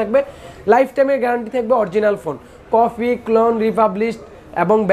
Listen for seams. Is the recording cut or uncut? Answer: uncut